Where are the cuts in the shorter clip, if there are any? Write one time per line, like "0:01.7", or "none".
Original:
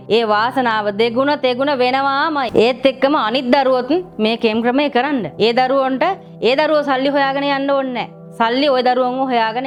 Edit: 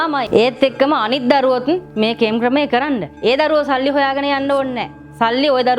0:03.1